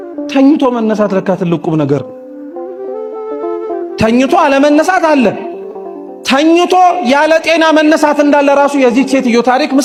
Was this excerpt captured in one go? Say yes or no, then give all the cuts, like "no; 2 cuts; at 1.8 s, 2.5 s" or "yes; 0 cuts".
yes; 0 cuts